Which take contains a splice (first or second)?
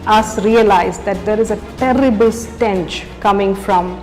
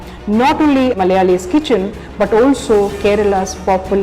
second